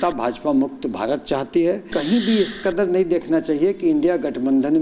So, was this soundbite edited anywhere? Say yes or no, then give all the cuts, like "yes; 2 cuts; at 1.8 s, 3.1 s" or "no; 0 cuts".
yes; 1 cut; at 1.9 s